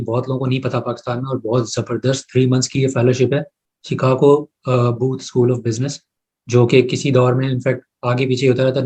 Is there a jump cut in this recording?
no; 0 cuts

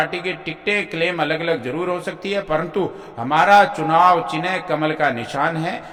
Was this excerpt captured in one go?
yes; 0 cuts

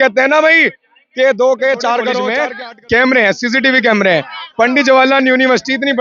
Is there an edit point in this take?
yes; 1 cut; at 2.3 s

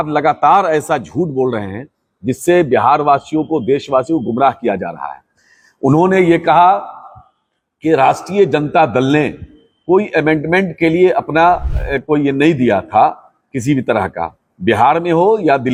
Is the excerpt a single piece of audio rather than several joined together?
yes; 0 cuts

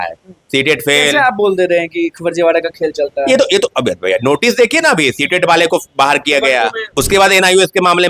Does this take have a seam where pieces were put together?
yes; 1 cut; at 6.8 s

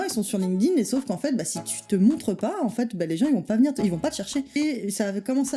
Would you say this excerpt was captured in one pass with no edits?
no; 1 cut; at 4.6 s

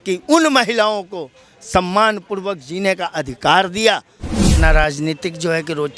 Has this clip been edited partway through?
yes; 1 cut; at 4.6 s

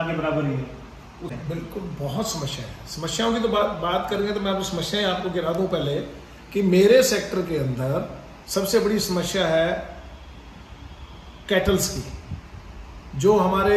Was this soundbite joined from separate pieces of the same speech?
yes; 1 cut; at 1.3 s

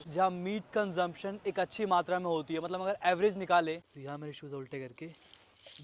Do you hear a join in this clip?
yes; 1 cut; at 3.8 s

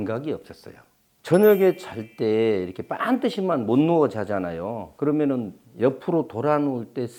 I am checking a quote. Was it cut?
no; 0 cuts

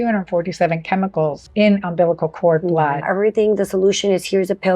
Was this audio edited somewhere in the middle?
yes; 2 cuts; at 1.4 s, 3.1 s

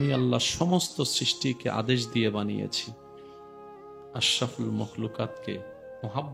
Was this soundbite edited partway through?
yes; 2 cuts; at 2.7 s, 4.3 s

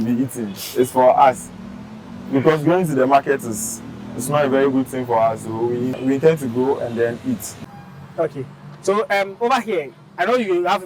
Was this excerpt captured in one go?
no; 2 cuts; at 6.0 s, 7.5 s

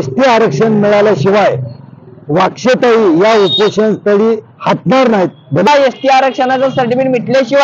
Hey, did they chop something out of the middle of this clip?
yes; 1 cut; at 5.7 s

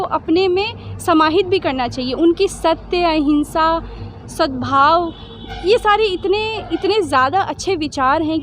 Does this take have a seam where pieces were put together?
no; 0 cuts

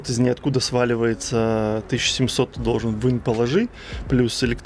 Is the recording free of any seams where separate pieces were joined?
yes; 0 cuts

